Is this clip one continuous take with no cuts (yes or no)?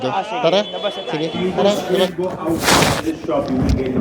no